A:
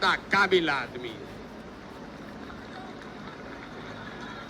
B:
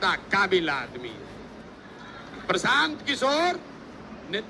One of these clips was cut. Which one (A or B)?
B